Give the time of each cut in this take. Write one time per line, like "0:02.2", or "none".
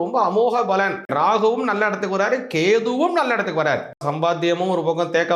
0:01.1
0:04.0